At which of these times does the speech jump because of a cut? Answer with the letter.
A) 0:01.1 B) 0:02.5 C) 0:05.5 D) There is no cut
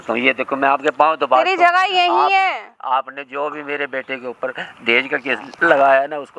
C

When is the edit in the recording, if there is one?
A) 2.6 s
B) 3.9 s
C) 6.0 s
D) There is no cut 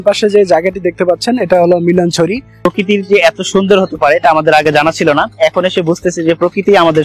A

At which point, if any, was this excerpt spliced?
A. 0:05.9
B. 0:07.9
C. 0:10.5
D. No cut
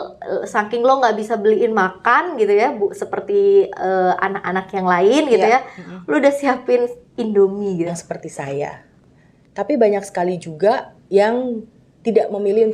B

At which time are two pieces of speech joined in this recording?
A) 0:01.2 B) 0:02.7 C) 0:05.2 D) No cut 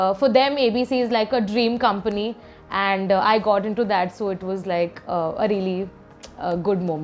D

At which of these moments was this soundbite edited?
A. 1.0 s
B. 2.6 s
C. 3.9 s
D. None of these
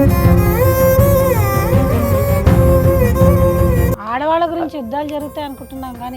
C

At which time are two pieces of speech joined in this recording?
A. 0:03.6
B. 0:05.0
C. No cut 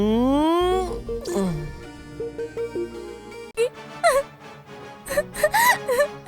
A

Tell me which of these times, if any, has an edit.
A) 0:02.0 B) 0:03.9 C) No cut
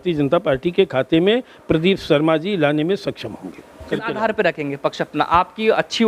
B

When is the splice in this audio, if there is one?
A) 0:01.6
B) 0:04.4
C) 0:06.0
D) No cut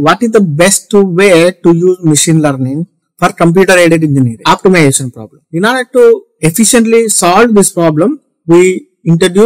B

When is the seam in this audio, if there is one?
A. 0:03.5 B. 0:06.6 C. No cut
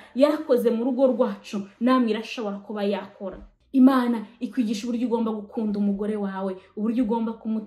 A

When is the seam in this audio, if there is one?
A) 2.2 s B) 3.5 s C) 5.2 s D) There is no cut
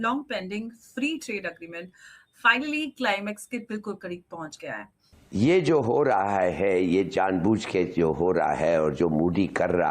C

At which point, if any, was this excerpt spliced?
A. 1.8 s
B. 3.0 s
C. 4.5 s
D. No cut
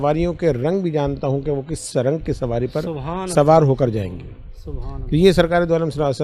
D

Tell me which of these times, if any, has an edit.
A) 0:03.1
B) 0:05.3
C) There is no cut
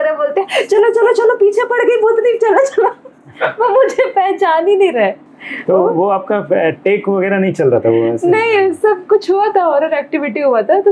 C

